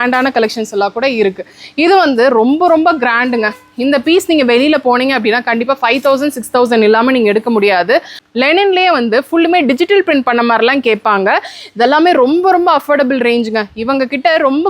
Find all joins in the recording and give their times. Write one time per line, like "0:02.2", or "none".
0:08.2